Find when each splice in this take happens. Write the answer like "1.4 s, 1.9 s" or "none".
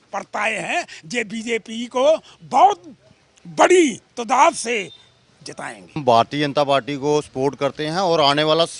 6.0 s